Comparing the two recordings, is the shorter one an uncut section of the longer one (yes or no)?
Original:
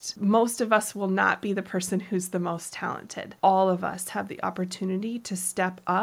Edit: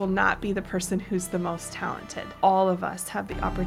yes